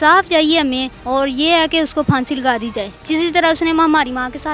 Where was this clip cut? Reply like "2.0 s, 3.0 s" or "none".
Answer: 0.9 s, 2.9 s